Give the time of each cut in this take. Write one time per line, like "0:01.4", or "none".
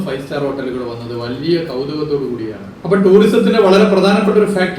0:02.7